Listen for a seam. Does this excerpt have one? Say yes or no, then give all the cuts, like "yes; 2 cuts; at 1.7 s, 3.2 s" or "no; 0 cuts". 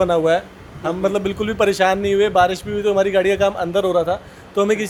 no; 0 cuts